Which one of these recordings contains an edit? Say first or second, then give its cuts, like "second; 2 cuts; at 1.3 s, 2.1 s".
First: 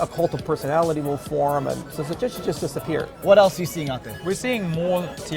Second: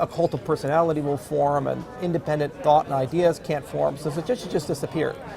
first; 3 cuts; at 1.9 s, 3.1 s, 4.1 s